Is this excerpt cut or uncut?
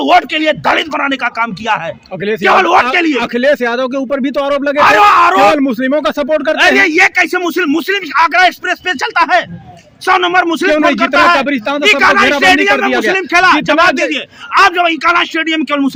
uncut